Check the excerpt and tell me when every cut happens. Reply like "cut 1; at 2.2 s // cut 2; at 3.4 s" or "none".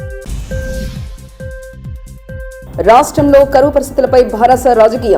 cut 1; at 2.6 s